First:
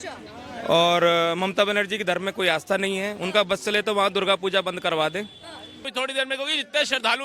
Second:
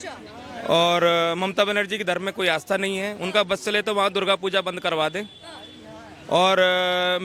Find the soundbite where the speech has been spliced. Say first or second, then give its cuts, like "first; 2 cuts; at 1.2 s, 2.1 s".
first; 1 cut; at 5.9 s